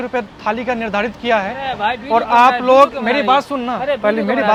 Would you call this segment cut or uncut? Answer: uncut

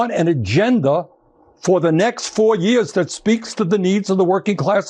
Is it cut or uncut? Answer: uncut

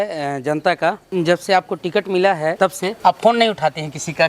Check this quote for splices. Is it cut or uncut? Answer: cut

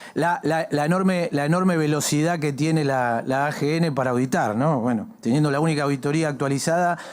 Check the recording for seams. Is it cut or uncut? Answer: uncut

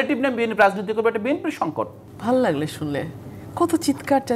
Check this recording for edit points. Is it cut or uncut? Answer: cut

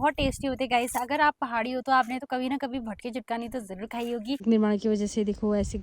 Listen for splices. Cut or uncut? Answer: cut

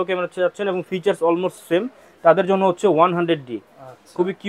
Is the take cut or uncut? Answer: uncut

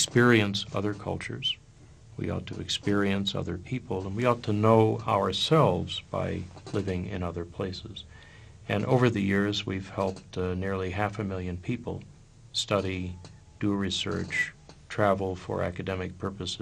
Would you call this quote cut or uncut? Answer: cut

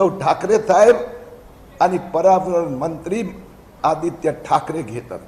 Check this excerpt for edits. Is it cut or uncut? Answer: uncut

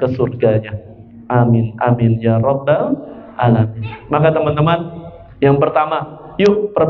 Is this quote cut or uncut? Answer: uncut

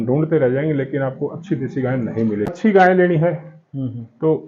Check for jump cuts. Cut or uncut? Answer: cut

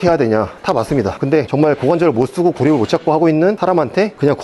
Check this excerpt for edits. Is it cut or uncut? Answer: cut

